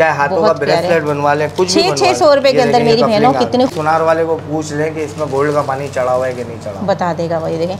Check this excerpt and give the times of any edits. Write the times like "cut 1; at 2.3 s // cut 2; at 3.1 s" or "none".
cut 1; at 3.7 s